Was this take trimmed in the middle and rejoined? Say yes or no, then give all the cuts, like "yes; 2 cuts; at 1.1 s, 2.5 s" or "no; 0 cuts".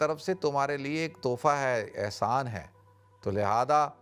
no; 0 cuts